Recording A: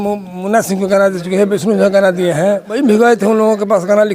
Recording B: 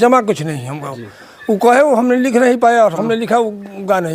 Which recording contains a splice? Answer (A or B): A